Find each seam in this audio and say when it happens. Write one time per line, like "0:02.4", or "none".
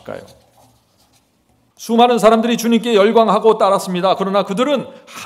0:01.7